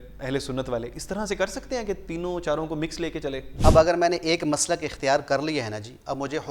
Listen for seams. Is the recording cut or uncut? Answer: cut